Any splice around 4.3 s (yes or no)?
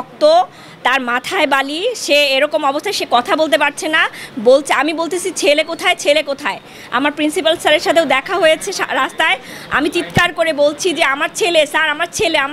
no